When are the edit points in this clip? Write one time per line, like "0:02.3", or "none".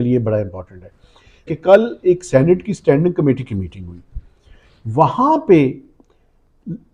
0:01.5